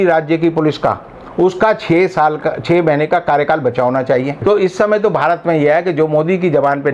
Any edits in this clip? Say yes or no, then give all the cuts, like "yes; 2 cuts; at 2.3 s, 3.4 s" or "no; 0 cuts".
yes; 1 cut; at 4.4 s